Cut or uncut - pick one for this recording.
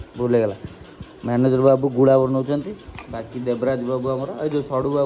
uncut